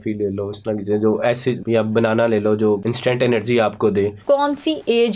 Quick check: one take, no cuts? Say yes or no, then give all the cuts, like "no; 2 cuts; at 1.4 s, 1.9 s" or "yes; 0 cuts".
no; 3 cuts; at 1.6 s, 2.9 s, 4.2 s